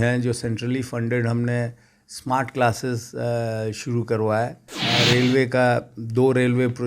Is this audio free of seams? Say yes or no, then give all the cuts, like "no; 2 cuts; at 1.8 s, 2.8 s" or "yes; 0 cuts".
no; 1 cut; at 4.8 s